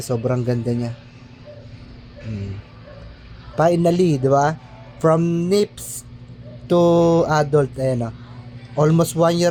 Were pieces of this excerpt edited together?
no; 0 cuts

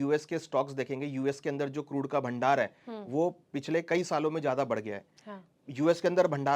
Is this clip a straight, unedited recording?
yes; 0 cuts

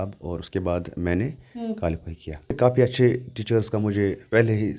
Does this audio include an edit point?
yes; 1 cut; at 2.5 s

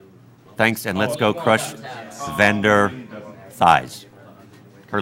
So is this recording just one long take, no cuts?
yes; 0 cuts

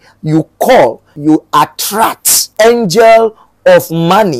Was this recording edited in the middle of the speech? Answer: yes; 2 cuts; at 1.2 s, 2.5 s

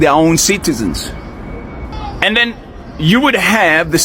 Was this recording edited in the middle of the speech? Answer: yes; 1 cut; at 1.9 s

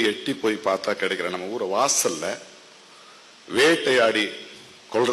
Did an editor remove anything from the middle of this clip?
no; 0 cuts

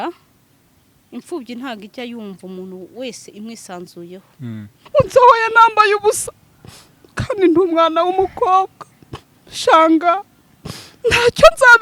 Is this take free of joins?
no; 1 cut; at 4.8 s

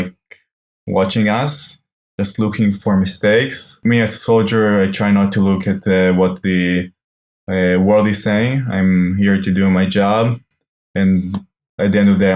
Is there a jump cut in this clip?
yes; 1 cut; at 3.8 s

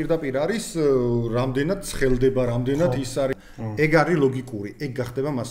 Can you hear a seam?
yes; 1 cut; at 3.3 s

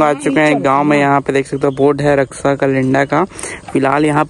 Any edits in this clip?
no; 0 cuts

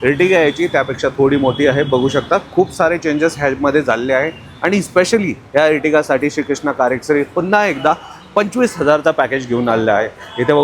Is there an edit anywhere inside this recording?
no; 0 cuts

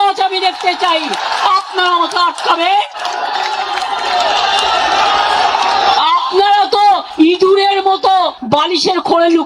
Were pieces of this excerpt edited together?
no; 0 cuts

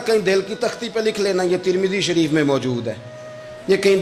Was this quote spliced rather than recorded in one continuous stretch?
no; 0 cuts

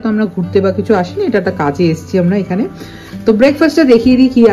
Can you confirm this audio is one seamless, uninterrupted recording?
yes; 0 cuts

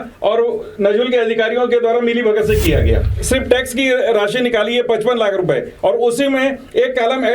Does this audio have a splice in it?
yes; 1 cut; at 3.1 s

